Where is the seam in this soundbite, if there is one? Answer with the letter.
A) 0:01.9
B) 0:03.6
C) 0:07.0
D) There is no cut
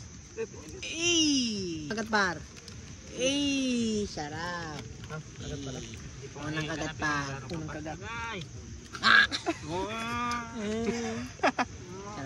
A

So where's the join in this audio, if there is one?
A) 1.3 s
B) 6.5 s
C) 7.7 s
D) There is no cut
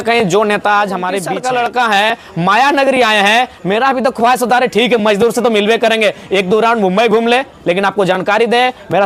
A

